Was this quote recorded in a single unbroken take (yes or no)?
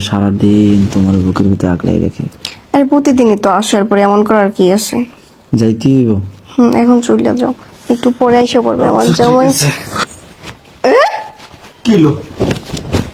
yes